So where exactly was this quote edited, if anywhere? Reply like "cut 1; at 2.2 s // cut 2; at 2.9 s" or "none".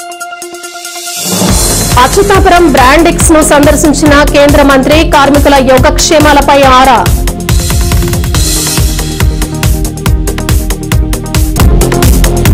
cut 1; at 1.6 s

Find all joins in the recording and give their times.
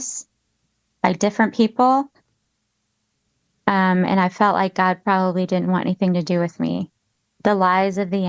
none

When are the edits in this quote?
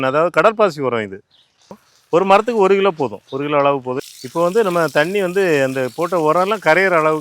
cut 1; at 1.8 s // cut 2; at 4.0 s

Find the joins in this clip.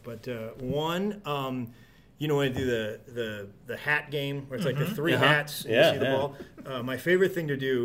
none

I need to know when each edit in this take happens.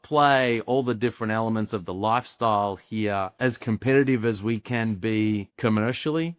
cut 1; at 3.3 s // cut 2; at 5.5 s

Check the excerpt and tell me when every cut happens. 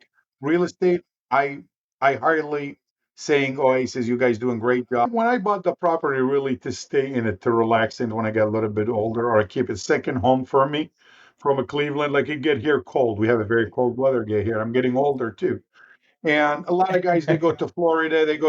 cut 1; at 5.1 s

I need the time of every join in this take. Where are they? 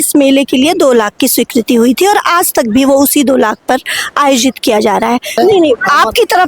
cut 1; at 5.4 s

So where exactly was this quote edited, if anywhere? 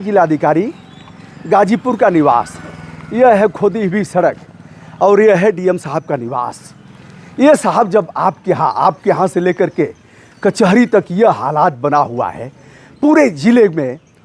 none

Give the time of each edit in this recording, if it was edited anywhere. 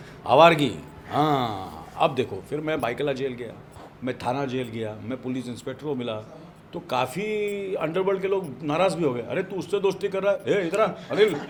none

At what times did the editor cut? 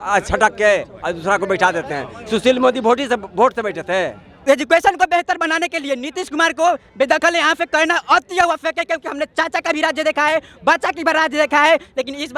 cut 1; at 4.2 s

